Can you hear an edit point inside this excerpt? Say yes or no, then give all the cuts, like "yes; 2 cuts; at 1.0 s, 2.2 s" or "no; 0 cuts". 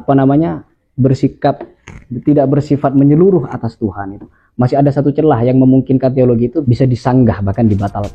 yes; 1 cut; at 6.6 s